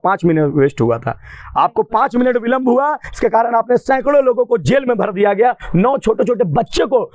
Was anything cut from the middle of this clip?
no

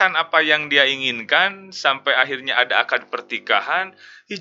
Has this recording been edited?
no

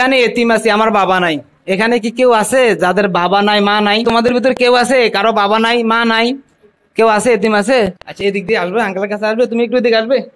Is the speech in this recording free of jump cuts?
no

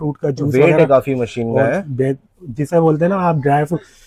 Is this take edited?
no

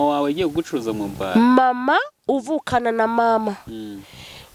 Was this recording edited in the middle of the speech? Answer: no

